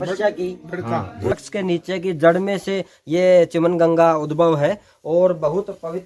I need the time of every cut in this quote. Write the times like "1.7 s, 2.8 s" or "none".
1.4 s